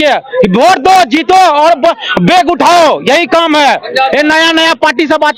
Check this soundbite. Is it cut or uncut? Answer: uncut